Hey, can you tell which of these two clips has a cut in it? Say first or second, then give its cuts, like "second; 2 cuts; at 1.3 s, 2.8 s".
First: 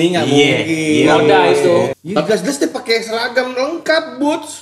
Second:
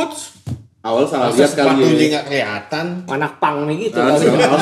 first; 1 cut; at 1.9 s